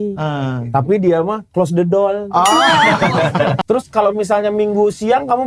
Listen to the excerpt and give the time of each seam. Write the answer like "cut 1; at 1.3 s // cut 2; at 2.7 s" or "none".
cut 1; at 3.6 s